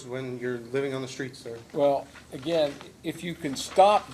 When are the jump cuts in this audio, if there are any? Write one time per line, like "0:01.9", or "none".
0:01.5